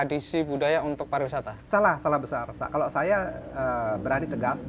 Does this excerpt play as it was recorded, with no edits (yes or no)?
yes